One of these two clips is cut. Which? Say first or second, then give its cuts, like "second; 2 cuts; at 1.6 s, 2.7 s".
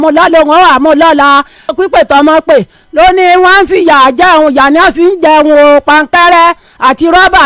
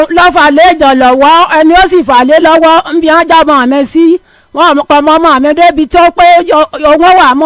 first; 1 cut; at 1.7 s